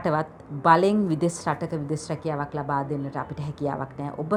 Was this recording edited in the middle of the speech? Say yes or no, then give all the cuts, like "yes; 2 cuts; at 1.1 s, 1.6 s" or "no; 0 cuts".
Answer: no; 0 cuts